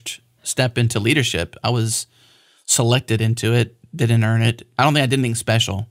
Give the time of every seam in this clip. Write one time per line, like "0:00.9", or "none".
0:04.7